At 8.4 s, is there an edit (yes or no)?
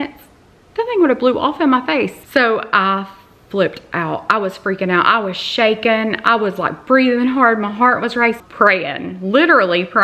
yes